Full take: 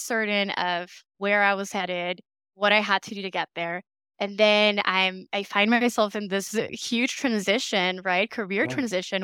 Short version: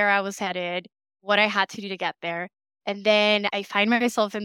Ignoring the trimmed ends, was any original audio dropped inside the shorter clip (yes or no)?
yes